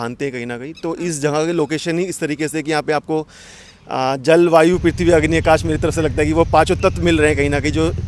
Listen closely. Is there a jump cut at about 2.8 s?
no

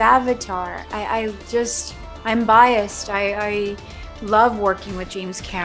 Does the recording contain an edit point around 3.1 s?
no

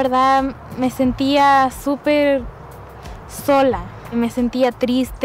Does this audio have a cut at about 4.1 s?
yes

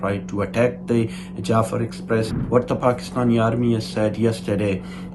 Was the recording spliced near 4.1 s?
no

